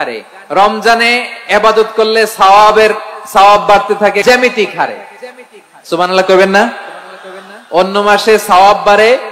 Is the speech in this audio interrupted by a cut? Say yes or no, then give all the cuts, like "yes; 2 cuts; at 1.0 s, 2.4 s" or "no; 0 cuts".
yes; 1 cut; at 4.2 s